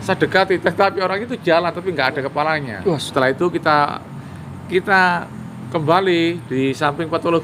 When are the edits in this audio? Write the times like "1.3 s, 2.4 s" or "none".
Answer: 3.1 s